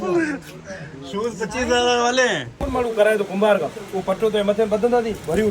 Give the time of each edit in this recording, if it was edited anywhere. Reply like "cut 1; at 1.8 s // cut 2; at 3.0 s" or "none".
cut 1; at 2.5 s